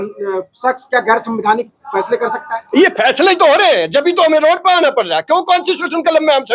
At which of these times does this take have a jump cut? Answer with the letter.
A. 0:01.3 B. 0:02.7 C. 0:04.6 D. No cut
D